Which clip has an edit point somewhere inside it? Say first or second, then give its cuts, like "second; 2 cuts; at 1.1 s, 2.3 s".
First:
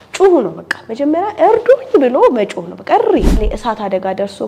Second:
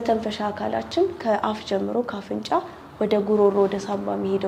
first; 1 cut; at 3.4 s